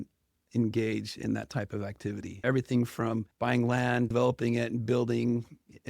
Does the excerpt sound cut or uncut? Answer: cut